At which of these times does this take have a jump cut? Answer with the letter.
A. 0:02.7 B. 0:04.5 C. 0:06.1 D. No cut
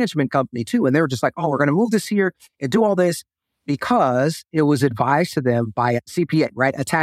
C